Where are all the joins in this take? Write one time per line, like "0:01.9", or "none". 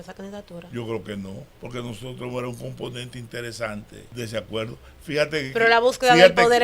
0:01.5
0:04.0